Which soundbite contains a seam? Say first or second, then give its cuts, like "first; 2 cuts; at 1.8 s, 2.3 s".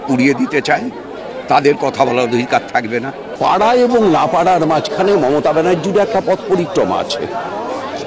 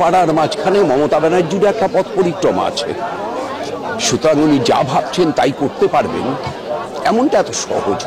first; 1 cut; at 3.3 s